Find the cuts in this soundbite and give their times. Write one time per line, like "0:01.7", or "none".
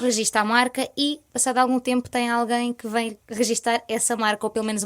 0:03.2